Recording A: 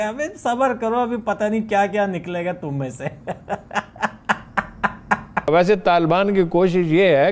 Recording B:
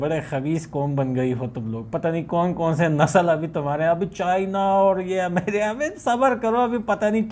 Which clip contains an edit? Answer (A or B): A